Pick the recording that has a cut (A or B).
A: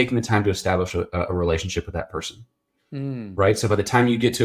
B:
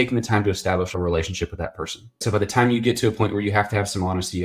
B